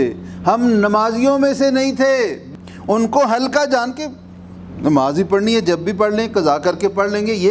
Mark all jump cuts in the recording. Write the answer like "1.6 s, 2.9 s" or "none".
2.4 s

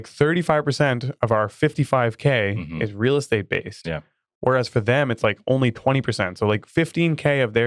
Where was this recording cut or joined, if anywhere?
none

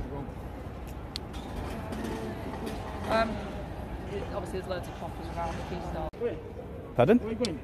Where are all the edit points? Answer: 6.1 s

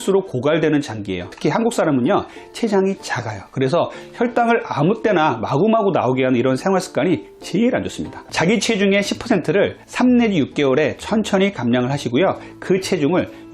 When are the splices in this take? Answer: 1.3 s, 8.2 s

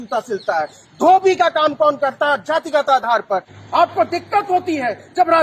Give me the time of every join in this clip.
3.5 s

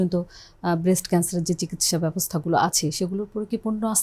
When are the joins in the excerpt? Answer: none

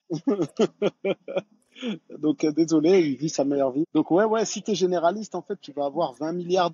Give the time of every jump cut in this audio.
3.9 s

